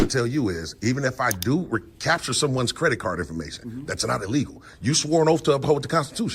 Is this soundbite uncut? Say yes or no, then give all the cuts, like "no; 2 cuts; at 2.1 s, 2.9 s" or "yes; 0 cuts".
yes; 0 cuts